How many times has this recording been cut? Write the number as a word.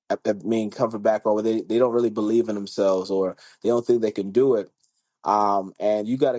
zero